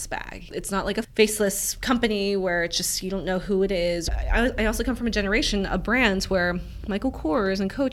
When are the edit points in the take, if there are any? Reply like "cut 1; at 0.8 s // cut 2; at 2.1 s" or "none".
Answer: cut 1; at 1.1 s // cut 2; at 4.1 s